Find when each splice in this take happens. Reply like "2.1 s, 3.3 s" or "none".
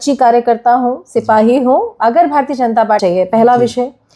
3.0 s